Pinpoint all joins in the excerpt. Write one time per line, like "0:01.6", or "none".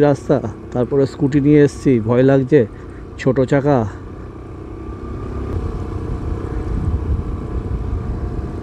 none